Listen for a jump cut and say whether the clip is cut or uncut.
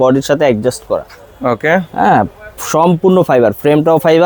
uncut